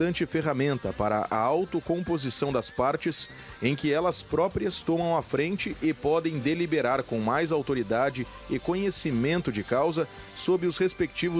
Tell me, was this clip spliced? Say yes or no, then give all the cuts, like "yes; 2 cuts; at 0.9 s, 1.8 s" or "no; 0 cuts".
no; 0 cuts